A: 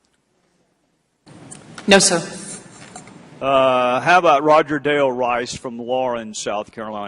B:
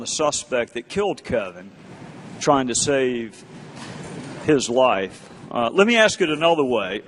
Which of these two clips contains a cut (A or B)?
A